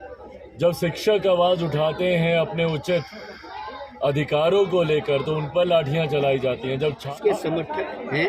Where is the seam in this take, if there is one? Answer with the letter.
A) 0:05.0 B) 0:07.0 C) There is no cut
B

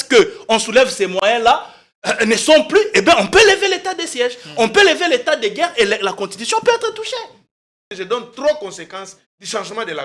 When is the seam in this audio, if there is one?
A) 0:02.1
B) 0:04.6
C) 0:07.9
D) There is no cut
C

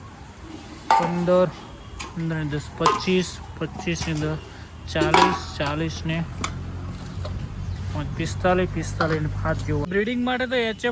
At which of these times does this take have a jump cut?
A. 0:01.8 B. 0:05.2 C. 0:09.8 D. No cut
C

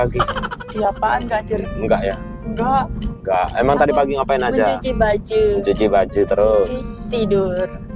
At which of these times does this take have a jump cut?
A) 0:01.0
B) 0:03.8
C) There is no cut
C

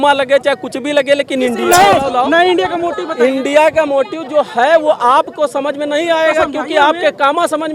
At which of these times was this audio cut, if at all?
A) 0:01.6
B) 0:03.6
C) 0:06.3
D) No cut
A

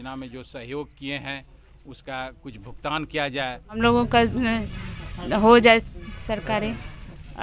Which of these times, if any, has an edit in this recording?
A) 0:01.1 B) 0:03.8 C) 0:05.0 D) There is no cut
B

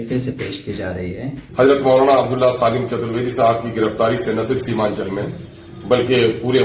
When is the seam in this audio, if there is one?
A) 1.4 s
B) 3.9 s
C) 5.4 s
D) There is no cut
A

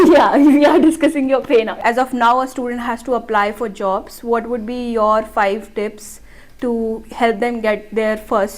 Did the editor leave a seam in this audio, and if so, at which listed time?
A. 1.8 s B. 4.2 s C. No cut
A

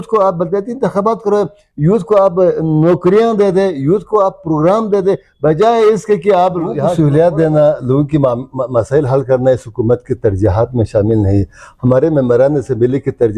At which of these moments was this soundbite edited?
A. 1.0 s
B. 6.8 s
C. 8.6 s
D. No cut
B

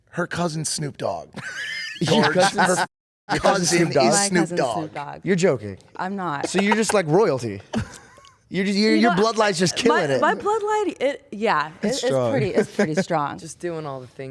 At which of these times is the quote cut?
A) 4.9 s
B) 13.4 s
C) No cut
B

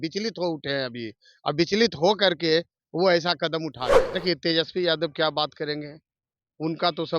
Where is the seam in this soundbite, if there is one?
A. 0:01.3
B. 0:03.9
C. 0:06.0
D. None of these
B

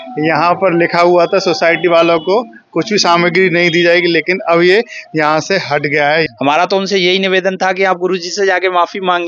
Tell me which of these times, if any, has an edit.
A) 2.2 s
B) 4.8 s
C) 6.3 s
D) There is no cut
C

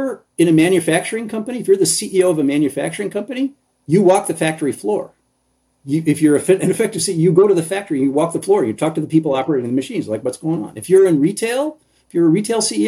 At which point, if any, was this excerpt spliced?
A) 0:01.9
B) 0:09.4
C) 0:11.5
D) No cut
D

